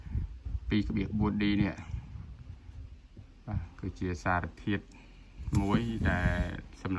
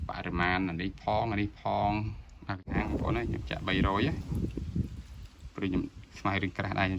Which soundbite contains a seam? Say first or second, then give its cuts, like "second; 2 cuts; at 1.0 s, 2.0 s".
second; 1 cut; at 2.7 s